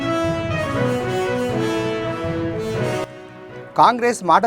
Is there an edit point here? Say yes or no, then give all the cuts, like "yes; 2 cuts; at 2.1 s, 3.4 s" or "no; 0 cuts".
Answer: yes; 1 cut; at 3.1 s